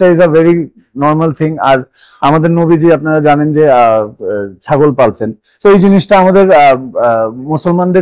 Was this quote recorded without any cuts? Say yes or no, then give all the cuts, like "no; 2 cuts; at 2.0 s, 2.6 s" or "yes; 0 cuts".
yes; 0 cuts